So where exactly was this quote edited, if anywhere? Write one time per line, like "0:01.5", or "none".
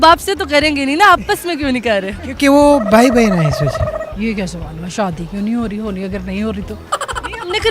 none